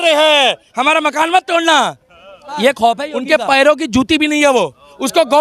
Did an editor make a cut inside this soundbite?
yes; 1 cut; at 3.1 s

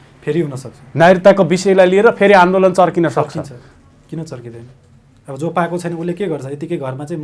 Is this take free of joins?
yes; 0 cuts

